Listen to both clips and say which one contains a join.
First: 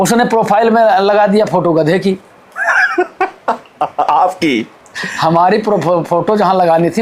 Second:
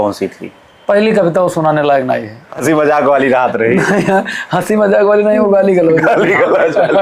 second; 1 cut; at 2.4 s

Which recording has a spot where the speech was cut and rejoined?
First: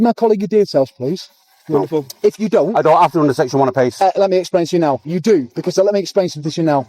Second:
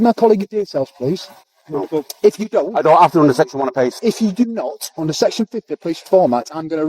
second; 1 cut; at 3.9 s

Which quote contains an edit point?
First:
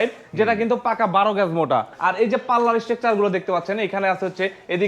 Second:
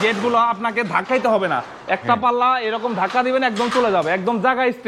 first; 1 cut; at 1.9 s

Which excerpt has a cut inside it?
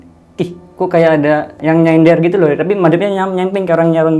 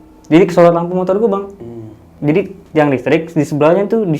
first; 1 cut; at 1.5 s

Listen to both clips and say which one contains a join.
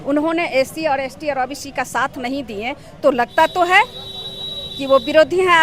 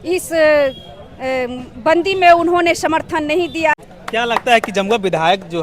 second; 1 cut; at 3.9 s

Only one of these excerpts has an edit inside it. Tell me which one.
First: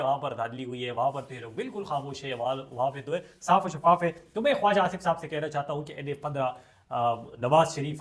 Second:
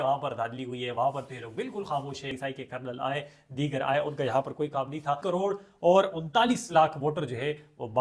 second; 2 cuts; at 2.3 s, 5.2 s

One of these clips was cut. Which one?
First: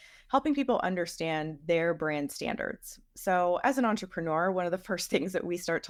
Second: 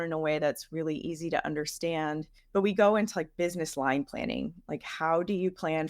second; 1 cut; at 2.3 s

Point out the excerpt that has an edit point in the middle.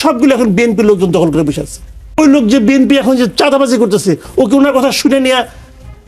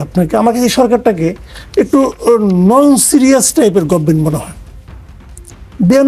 first; 1 cut; at 2.0 s

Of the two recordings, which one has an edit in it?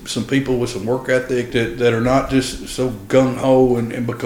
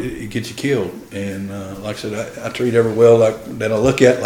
first; 1 cut; at 1.5 s

